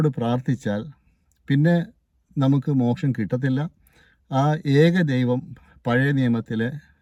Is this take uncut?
yes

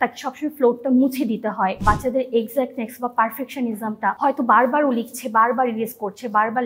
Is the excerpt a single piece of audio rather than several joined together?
no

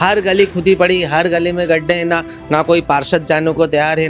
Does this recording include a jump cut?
no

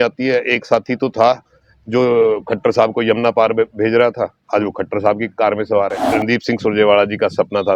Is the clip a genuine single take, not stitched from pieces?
no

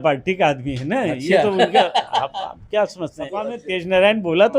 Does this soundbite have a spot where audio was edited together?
yes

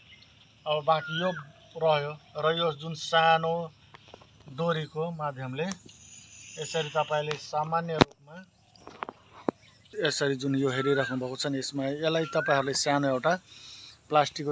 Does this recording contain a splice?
yes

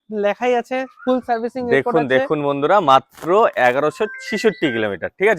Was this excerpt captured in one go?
yes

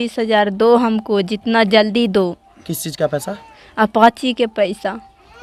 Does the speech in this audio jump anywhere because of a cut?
no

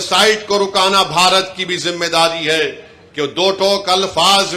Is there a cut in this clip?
no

